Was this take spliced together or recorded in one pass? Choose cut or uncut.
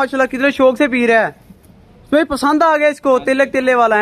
uncut